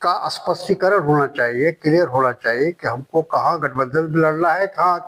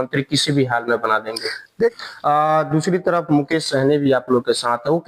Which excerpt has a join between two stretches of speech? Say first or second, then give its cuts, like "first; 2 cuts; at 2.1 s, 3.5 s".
second; 1 cut; at 1.9 s